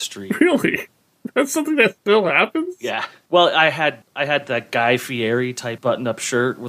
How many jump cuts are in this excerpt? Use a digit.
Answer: 2